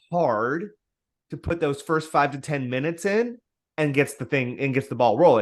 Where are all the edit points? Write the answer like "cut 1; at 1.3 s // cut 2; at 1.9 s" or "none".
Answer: none